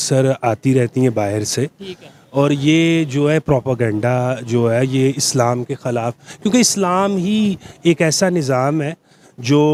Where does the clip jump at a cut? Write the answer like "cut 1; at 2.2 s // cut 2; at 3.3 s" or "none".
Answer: none

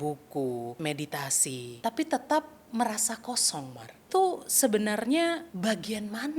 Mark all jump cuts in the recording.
cut 1; at 1.2 s // cut 2; at 4.0 s // cut 3; at 5.5 s

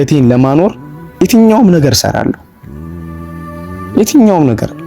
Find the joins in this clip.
cut 1; at 2.4 s // cut 2; at 3.9 s

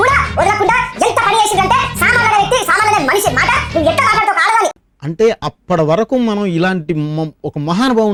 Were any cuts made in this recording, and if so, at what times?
none

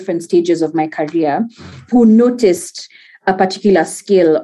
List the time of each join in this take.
cut 1; at 1.9 s

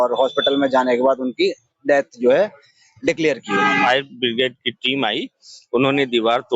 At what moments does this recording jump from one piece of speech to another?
cut 1; at 3.9 s

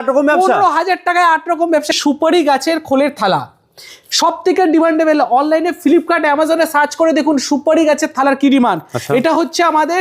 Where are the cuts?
cut 1; at 2.0 s

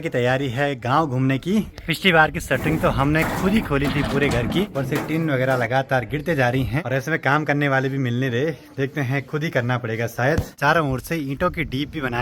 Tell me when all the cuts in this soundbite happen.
cut 1; at 1.7 s // cut 2; at 4.6 s // cut 3; at 6.8 s // cut 4; at 10.6 s

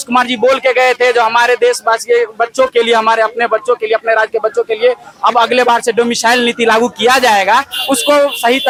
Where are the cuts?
none

